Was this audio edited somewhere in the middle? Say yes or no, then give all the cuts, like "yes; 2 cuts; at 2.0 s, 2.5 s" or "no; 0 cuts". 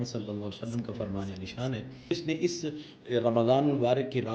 yes; 1 cut; at 2.1 s